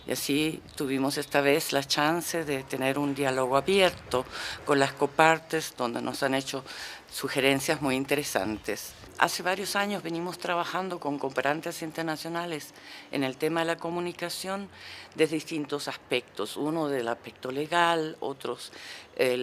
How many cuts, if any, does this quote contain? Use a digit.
1